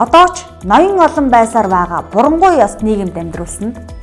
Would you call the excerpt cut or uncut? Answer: uncut